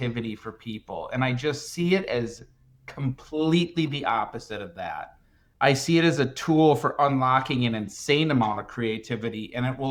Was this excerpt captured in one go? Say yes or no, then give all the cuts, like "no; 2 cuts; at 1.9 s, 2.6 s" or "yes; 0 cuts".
yes; 0 cuts